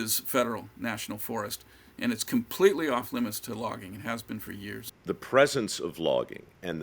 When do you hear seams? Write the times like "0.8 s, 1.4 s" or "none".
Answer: 4.9 s